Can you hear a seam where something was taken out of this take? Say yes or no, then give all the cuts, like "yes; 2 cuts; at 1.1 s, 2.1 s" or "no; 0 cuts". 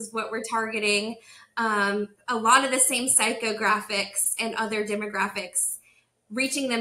no; 0 cuts